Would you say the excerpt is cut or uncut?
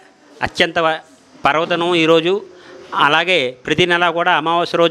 uncut